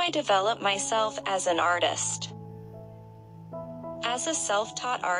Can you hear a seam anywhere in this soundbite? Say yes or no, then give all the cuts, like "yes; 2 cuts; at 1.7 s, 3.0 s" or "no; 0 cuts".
yes; 2 cuts; at 2.0 s, 4.0 s